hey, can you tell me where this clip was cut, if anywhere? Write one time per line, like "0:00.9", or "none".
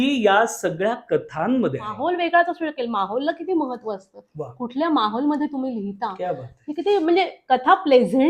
0:01.9